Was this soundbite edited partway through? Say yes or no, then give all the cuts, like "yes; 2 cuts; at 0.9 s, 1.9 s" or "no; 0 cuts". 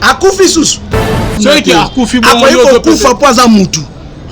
yes; 1 cut; at 1.2 s